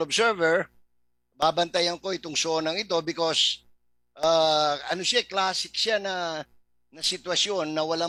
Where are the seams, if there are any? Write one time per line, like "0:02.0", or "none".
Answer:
none